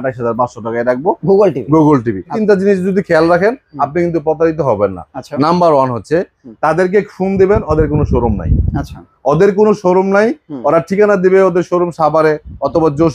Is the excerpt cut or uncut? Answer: cut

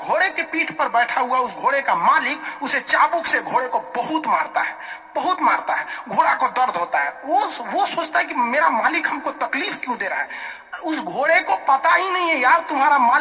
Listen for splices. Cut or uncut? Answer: uncut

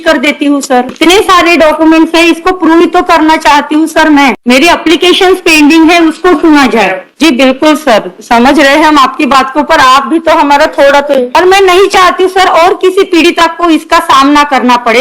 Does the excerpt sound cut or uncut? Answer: cut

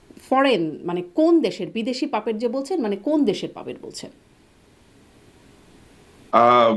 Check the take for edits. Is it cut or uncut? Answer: uncut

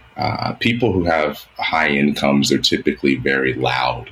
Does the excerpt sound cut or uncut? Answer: uncut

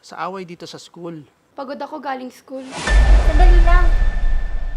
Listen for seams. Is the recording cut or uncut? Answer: cut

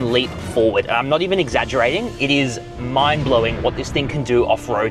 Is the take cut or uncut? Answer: uncut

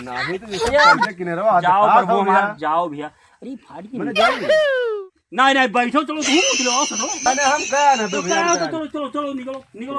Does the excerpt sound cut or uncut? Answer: uncut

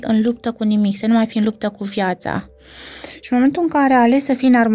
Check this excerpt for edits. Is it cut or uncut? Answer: uncut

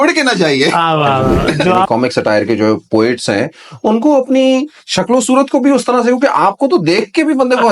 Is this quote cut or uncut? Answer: cut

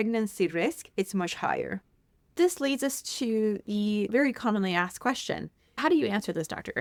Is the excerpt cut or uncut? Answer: uncut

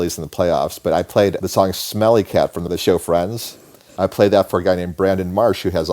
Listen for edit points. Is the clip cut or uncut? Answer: cut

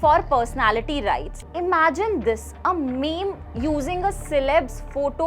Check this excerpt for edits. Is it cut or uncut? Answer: cut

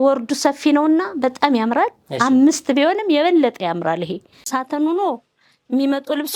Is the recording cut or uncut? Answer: cut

